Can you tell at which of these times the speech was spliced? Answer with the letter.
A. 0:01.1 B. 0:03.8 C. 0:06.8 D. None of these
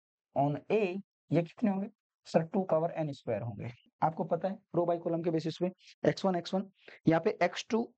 B